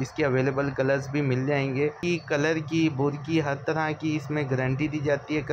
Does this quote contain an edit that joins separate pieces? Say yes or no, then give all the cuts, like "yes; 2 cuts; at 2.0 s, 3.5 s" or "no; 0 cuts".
yes; 1 cut; at 2.0 s